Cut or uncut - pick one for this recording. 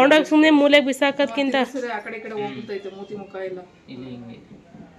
uncut